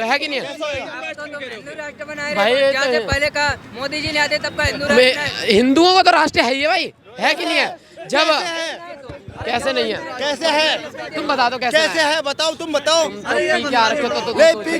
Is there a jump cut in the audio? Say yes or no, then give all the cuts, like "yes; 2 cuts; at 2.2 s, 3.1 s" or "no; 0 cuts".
no; 0 cuts